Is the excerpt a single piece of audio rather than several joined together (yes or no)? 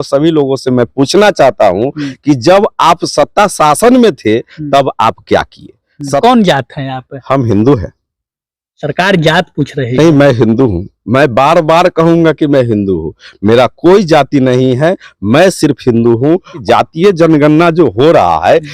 no